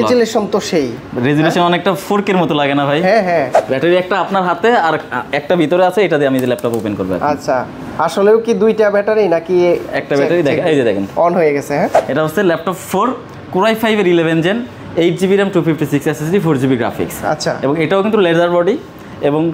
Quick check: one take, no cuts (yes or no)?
no